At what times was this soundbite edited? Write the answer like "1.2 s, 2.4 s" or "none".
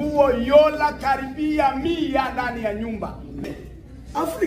3.5 s